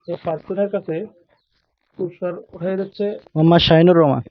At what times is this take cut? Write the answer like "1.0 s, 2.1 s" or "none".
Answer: 3.2 s